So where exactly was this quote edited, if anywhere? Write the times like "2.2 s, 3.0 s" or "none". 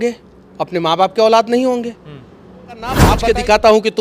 3.0 s